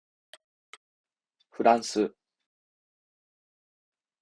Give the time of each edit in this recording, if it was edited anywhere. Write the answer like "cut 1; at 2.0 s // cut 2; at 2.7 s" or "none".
cut 1; at 0.9 s